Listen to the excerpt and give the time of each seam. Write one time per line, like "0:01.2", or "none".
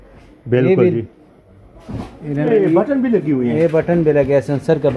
0:02.4